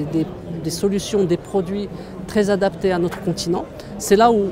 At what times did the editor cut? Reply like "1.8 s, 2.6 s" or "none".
none